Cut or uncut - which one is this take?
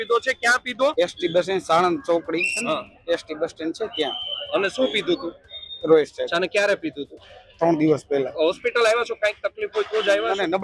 cut